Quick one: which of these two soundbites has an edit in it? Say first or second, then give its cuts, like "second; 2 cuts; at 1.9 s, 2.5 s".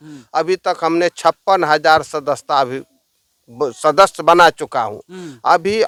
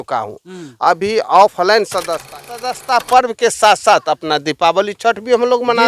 second; 1 cut; at 2.7 s